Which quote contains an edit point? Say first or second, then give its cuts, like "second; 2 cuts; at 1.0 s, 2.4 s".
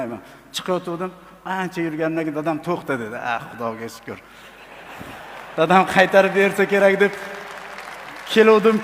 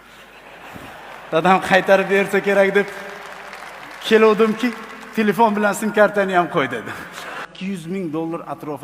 second; 1 cut; at 7.4 s